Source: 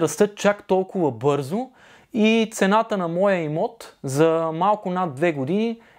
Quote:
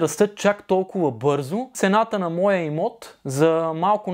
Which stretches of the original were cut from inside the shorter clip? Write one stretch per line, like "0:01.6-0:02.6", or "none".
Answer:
0:01.7-0:02.5